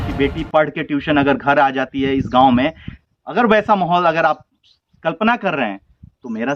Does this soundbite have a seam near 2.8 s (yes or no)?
no